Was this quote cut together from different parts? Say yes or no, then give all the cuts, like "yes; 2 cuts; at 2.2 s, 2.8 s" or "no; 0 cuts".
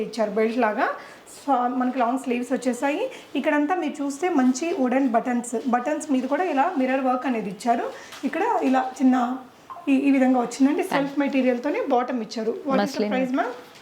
no; 0 cuts